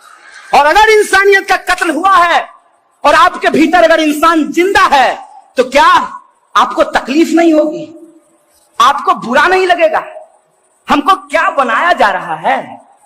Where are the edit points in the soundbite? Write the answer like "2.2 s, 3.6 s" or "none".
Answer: none